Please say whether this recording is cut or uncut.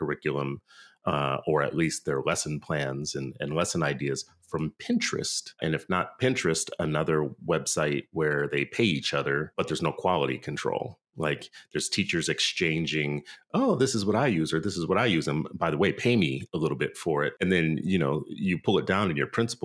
cut